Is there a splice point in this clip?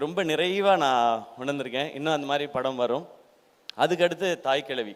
no; 0 cuts

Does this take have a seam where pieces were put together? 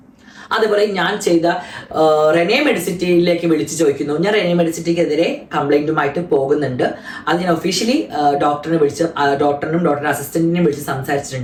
no; 0 cuts

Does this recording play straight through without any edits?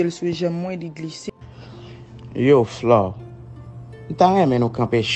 no; 1 cut; at 1.3 s

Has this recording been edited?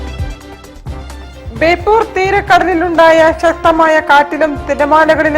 yes; 1 cut; at 0.9 s

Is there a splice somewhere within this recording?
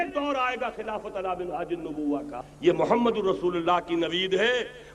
yes; 1 cut; at 2.4 s

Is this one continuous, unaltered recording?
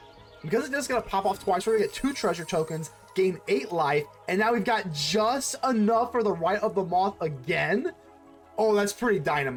yes; 0 cuts

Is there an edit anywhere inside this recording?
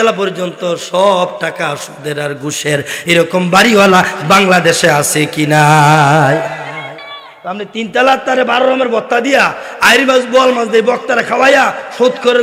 no; 0 cuts

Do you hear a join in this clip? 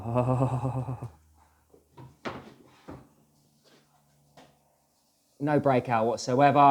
no; 0 cuts

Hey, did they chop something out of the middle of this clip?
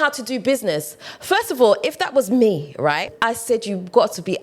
yes; 1 cut; at 3.1 s

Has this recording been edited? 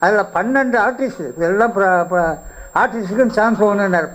no; 0 cuts

